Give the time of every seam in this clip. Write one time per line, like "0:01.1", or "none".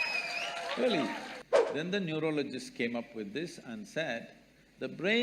0:01.3